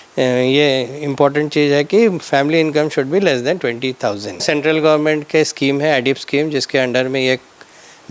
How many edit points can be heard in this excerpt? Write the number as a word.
one